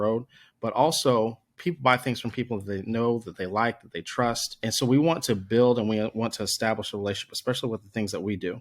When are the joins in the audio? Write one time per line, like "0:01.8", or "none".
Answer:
0:01.5
0:04.6